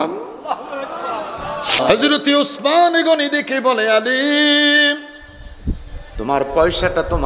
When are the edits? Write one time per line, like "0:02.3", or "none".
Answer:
0:01.8